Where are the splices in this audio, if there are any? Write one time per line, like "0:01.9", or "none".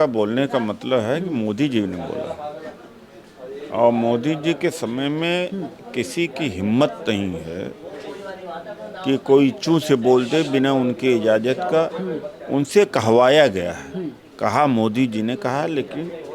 none